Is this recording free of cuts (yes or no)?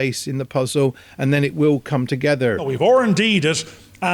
no